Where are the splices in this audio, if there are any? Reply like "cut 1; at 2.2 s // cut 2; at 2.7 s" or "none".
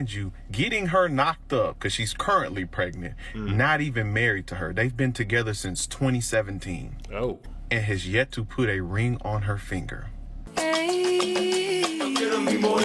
none